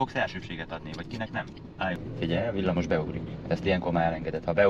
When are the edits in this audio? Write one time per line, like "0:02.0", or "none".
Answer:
0:02.0